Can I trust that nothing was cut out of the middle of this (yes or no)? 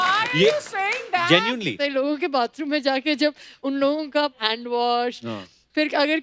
no